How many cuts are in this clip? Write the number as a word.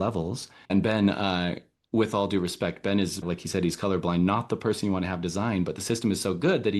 two